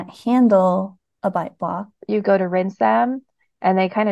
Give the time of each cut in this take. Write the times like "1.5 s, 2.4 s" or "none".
2.0 s